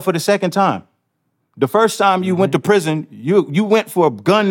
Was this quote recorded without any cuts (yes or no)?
yes